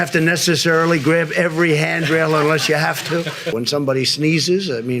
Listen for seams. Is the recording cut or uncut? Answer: cut